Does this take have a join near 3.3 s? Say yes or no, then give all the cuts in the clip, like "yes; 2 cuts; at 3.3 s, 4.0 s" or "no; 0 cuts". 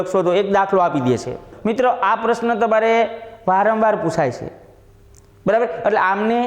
no; 1 cut; at 1.5 s